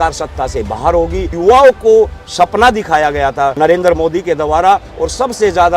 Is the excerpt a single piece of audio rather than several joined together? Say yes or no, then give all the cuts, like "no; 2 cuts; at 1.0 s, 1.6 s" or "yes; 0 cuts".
no; 2 cuts; at 1.3 s, 3.5 s